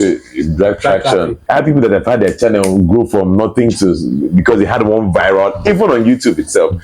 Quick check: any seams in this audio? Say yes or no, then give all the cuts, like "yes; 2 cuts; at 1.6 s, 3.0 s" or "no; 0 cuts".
yes; 1 cut; at 1.4 s